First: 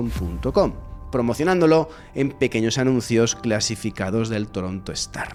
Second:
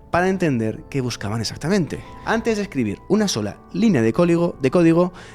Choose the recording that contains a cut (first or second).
second